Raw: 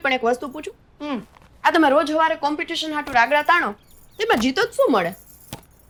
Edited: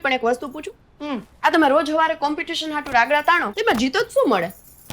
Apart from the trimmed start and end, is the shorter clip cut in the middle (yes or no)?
yes